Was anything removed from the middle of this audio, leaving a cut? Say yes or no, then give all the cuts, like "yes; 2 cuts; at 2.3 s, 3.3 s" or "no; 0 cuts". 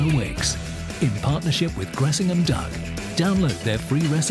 no; 0 cuts